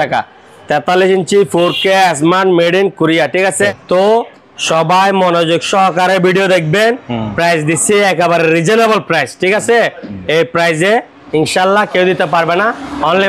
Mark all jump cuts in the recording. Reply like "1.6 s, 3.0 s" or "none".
3.6 s